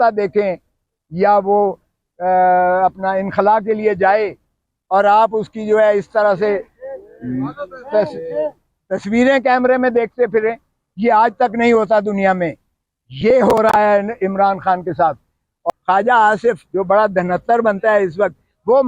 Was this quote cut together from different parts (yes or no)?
yes